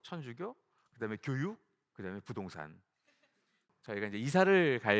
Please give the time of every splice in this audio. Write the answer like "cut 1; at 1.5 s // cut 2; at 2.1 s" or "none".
cut 1; at 3.7 s

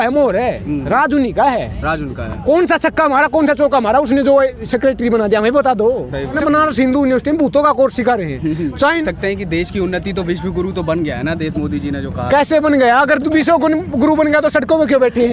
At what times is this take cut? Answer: cut 1; at 6.4 s // cut 2; at 9.0 s

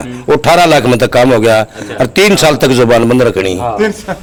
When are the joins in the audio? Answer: none

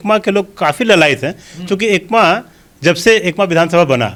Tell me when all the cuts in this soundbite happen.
none

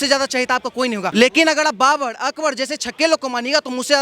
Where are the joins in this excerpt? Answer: cut 1; at 1.1 s

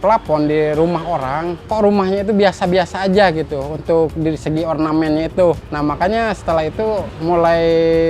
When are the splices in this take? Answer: cut 1; at 1.6 s // cut 2; at 5.7 s // cut 3; at 7.1 s

